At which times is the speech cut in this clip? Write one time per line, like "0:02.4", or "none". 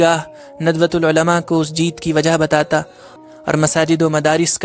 0:03.1